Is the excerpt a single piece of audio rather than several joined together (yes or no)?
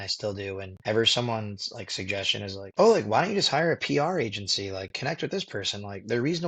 yes